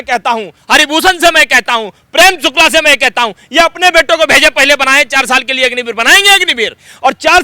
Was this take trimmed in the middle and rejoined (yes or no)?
no